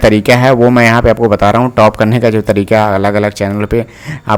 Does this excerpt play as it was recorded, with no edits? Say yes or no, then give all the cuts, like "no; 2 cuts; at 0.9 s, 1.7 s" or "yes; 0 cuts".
yes; 0 cuts